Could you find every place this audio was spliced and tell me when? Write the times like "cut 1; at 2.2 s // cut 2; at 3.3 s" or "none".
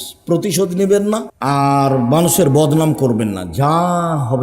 cut 1; at 1.3 s